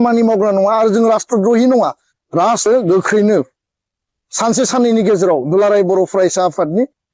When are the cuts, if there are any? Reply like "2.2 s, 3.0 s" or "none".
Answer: 2.7 s